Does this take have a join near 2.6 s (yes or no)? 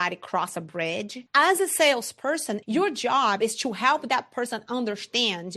yes